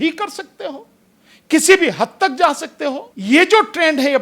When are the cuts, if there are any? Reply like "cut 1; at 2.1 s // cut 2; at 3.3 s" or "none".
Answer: cut 1; at 3.1 s